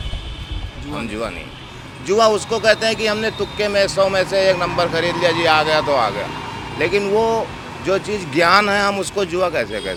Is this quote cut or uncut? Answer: uncut